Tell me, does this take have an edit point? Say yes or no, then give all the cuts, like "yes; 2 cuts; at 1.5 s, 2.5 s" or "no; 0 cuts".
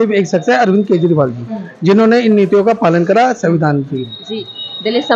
no; 0 cuts